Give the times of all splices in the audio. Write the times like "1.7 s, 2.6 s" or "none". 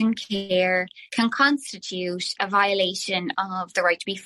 none

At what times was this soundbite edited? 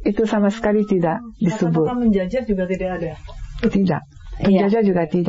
none

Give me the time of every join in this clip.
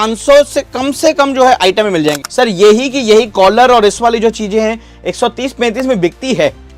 2.2 s

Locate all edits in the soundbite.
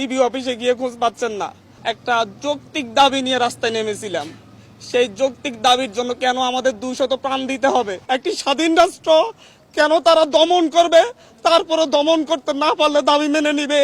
1.6 s, 8.0 s

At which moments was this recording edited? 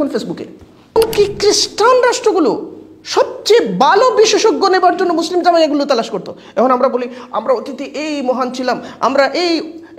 1.0 s

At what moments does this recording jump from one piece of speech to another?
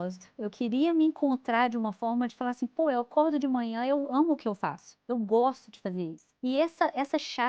6.2 s

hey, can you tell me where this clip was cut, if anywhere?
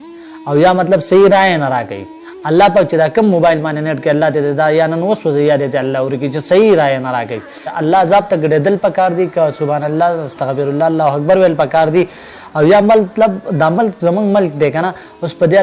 7.7 s

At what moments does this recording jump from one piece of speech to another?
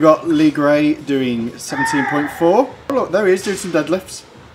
2.9 s

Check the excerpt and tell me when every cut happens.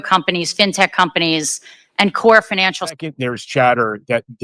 3.1 s

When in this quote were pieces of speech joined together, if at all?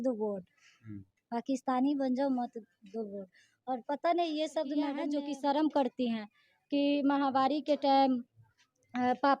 5.1 s

